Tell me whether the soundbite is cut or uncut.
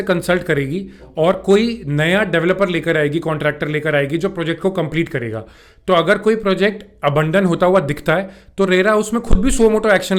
uncut